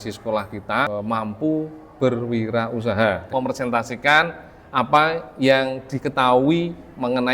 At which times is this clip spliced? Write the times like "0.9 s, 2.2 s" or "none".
0.9 s, 3.2 s

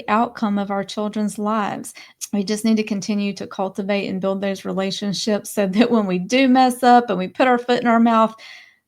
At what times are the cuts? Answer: 2.2 s

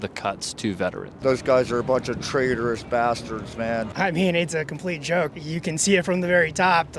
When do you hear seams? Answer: 1.2 s, 3.9 s, 5.3 s

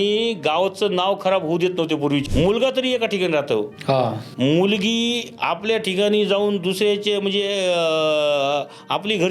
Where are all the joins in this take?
2.2 s

